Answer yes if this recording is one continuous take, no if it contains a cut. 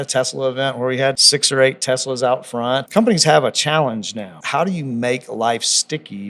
no